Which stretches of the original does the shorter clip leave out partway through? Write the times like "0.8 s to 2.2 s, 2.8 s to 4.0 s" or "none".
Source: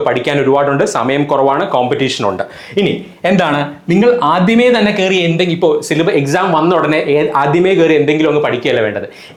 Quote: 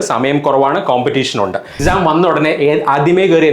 2.6 s to 6.3 s